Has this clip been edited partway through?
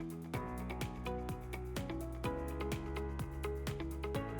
no; 0 cuts

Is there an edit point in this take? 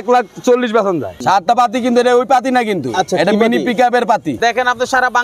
yes; 2 cuts; at 1.2 s, 4.4 s

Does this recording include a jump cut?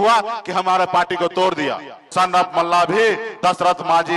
yes; 1 cut; at 2.1 s

